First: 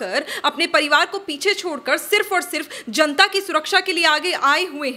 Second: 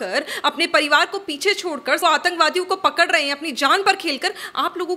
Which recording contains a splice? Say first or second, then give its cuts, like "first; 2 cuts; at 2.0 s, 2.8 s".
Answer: second; 1 cut; at 2.0 s